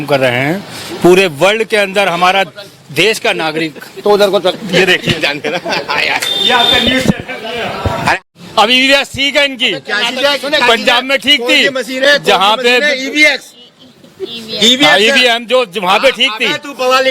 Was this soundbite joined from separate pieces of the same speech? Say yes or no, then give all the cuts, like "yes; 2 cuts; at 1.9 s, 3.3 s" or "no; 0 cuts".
yes; 1 cut; at 8.2 s